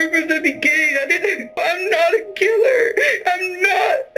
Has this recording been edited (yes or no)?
yes